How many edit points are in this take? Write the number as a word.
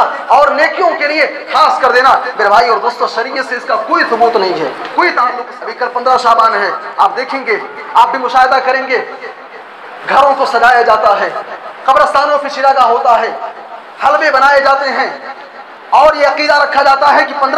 one